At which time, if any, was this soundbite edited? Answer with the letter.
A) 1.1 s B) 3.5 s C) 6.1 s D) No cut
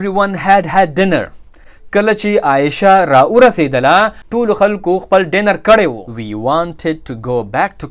C